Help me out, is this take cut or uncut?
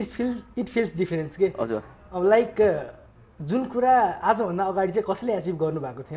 uncut